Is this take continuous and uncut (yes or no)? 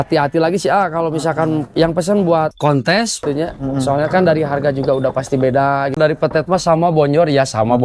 no